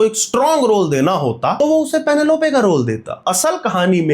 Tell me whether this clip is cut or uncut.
cut